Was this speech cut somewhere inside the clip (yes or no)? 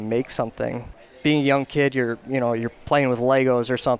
no